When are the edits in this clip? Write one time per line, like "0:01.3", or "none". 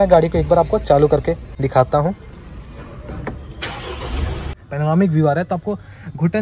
0:01.6
0:04.6